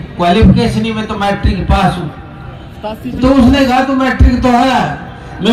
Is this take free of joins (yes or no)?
yes